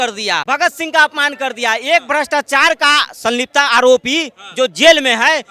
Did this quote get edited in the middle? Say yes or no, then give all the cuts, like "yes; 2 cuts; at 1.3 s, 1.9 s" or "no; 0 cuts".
no; 0 cuts